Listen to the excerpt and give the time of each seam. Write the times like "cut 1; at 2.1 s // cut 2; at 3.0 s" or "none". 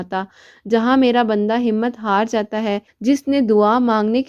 cut 1; at 2.9 s